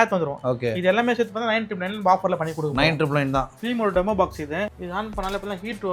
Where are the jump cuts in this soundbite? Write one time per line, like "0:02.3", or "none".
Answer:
0:03.6
0:04.7